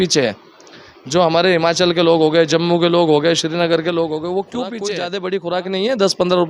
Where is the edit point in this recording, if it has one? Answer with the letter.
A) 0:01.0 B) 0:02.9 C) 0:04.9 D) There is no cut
C